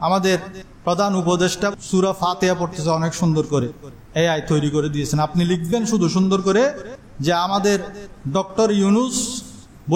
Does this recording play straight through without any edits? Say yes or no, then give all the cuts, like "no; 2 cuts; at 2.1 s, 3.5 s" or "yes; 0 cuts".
yes; 0 cuts